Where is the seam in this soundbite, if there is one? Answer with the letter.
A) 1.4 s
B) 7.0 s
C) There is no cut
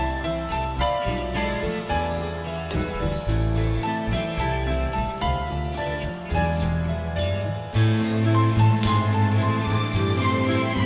C